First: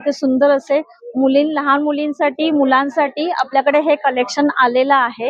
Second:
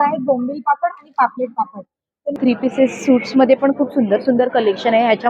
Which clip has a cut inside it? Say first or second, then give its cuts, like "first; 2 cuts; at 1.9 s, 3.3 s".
second; 1 cut; at 2.4 s